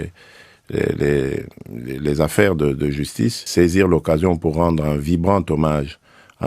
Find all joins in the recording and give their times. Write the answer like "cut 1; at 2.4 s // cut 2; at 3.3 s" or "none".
cut 1; at 3.4 s